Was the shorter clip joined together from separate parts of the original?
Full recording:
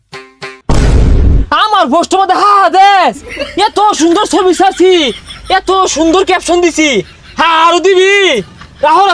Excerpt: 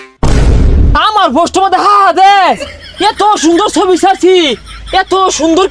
yes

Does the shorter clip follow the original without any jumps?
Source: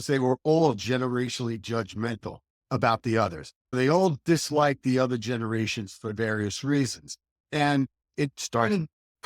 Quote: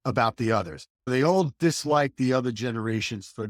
yes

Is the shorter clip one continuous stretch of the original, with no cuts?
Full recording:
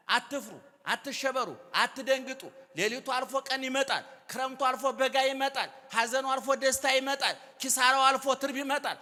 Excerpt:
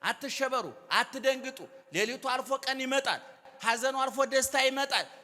no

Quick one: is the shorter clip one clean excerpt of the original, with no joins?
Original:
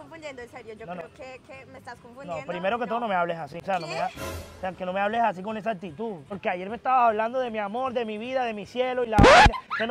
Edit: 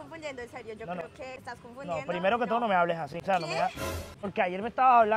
no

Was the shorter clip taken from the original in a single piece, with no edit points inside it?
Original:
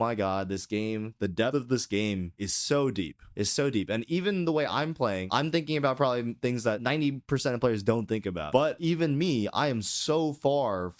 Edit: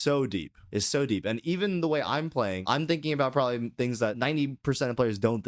yes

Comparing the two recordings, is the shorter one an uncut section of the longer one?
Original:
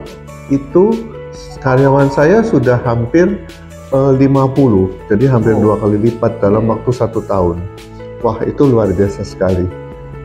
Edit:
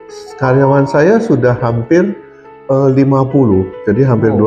yes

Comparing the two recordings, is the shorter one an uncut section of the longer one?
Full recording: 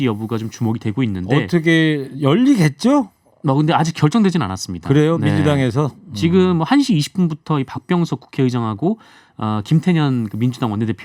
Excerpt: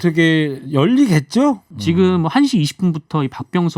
no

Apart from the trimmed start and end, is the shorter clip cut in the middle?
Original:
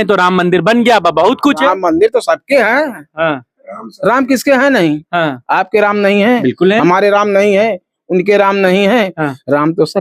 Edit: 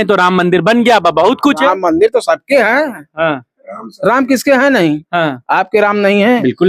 no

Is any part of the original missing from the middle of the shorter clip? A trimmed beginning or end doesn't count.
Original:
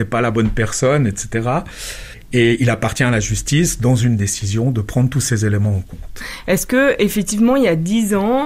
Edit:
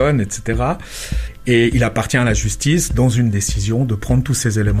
no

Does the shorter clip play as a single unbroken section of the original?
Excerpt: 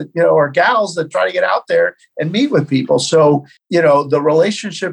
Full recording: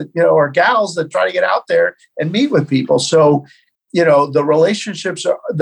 no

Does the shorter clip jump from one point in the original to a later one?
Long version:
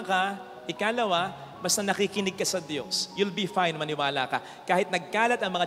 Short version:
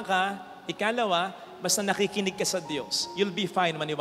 no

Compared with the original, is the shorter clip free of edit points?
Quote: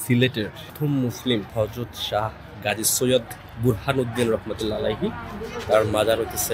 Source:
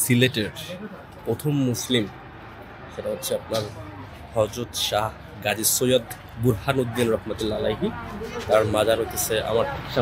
no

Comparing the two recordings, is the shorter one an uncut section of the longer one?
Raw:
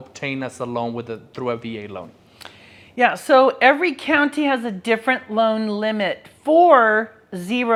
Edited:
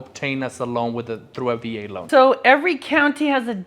no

